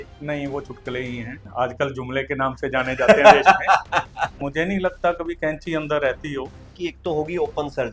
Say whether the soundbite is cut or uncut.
cut